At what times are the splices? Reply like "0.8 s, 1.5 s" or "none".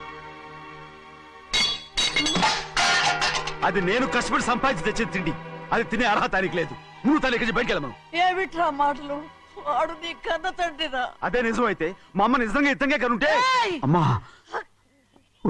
none